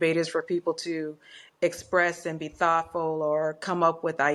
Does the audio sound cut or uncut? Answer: uncut